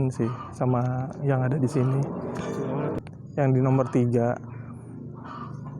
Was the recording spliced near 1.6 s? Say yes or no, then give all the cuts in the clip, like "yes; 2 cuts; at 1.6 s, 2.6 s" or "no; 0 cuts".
no; 1 cut; at 3.0 s